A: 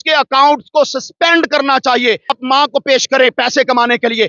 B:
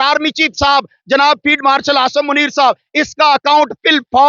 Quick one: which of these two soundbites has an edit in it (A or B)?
A